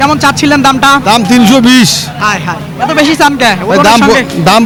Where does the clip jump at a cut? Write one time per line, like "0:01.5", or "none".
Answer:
none